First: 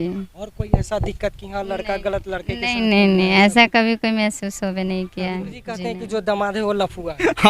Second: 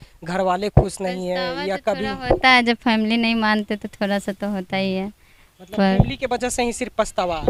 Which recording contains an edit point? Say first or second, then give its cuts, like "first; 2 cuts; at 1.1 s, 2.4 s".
first; 1 cut; at 5.7 s